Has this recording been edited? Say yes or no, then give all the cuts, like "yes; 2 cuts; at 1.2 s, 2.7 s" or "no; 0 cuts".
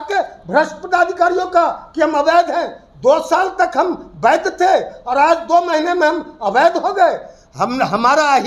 no; 0 cuts